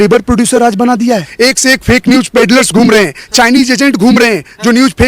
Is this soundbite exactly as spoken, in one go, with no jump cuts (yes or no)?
no